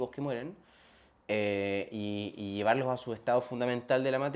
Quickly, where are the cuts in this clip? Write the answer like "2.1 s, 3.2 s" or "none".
none